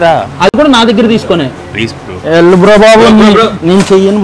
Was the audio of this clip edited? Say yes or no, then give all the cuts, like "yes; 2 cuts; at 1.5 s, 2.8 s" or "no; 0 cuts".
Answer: no; 0 cuts